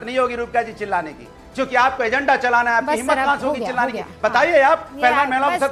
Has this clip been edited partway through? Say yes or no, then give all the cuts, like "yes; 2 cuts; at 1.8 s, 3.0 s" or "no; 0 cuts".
no; 0 cuts